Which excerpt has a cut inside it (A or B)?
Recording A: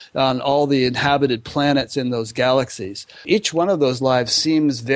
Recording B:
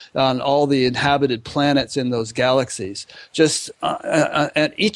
A